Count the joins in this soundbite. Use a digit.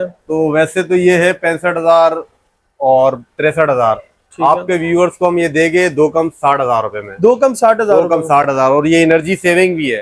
0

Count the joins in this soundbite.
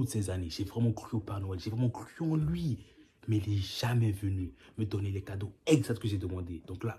0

